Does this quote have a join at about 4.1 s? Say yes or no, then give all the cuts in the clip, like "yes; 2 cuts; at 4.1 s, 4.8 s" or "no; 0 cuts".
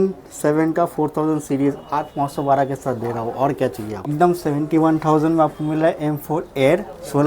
yes; 1 cut; at 4.1 s